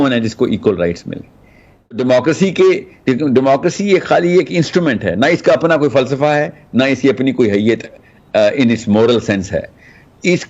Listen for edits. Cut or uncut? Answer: cut